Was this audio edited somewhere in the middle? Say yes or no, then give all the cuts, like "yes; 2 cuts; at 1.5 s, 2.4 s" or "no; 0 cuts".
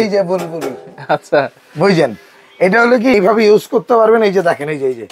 yes; 1 cut; at 3.1 s